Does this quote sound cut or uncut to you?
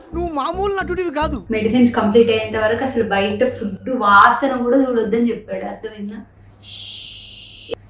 cut